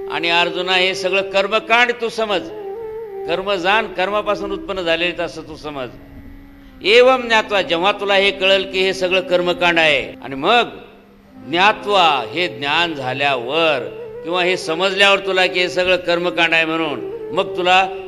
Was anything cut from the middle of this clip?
yes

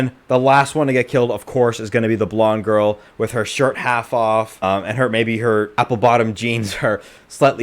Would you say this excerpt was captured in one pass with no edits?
no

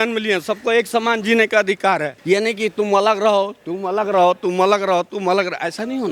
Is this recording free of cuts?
yes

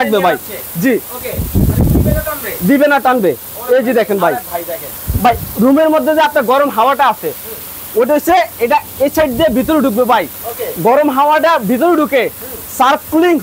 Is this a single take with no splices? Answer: yes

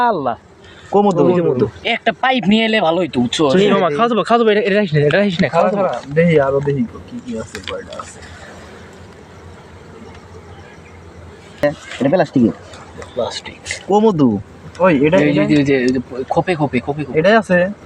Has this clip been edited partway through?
yes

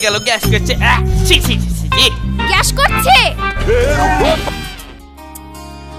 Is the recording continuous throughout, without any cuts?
yes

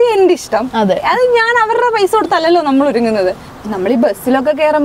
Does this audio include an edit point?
yes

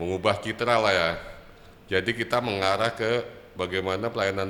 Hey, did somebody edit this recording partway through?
no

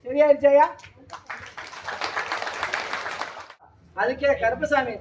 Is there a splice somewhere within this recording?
yes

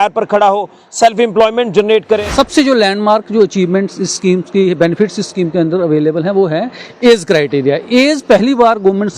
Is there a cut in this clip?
yes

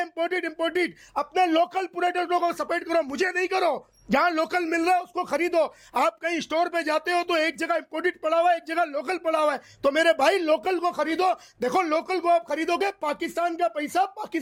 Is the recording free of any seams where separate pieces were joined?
yes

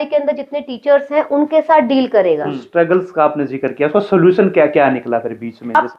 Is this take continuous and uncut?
no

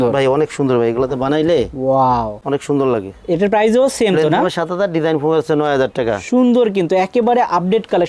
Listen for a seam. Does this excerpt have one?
no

